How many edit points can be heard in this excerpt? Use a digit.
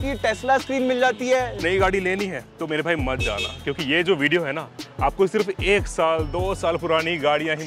1